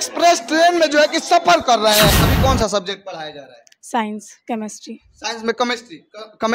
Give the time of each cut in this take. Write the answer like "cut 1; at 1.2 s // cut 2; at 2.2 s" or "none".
cut 1; at 2.2 s